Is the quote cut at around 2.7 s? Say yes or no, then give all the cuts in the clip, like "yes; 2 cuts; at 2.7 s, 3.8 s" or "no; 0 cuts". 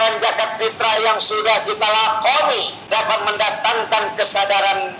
yes; 1 cut; at 2.7 s